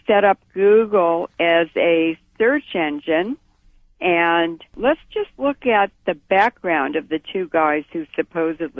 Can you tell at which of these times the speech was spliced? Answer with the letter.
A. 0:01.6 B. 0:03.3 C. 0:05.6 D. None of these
B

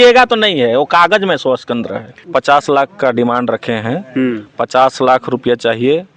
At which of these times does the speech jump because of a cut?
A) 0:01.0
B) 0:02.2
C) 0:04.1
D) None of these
B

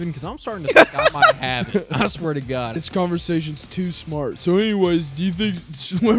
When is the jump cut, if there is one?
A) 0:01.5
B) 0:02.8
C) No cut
B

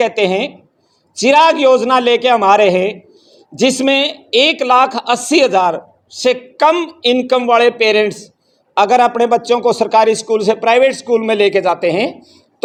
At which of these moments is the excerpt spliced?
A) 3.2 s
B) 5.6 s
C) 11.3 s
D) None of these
D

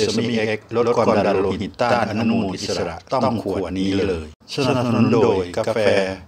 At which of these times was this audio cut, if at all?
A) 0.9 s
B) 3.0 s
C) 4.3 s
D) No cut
C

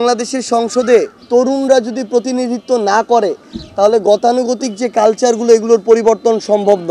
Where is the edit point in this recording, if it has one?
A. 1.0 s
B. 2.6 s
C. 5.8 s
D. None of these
D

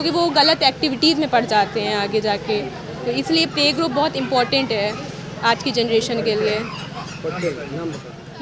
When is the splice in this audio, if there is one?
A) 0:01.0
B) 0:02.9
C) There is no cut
C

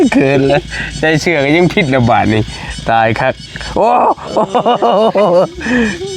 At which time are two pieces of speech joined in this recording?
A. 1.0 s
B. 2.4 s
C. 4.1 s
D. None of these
D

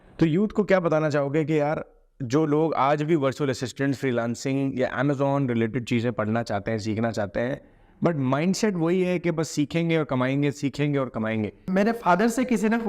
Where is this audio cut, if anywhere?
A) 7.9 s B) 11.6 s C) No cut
B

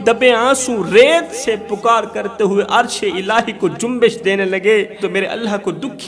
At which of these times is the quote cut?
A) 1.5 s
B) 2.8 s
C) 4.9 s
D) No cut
C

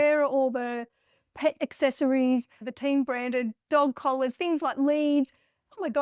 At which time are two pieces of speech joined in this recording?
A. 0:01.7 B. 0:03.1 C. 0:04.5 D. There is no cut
D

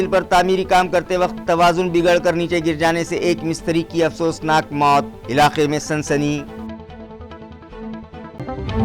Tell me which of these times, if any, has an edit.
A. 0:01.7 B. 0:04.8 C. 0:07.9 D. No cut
D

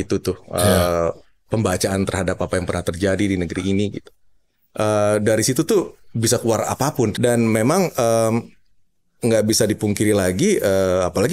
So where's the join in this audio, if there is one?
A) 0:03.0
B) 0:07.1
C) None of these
B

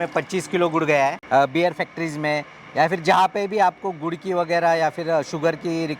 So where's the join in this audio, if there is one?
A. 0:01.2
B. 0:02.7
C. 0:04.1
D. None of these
A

